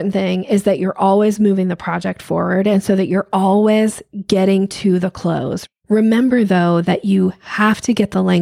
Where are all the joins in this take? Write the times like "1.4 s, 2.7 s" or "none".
5.6 s